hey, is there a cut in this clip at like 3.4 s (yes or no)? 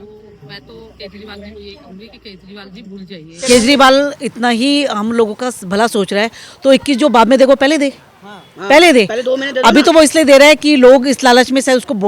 yes